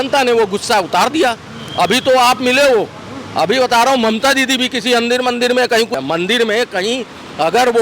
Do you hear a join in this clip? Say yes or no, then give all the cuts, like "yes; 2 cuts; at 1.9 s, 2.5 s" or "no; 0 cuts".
no; 0 cuts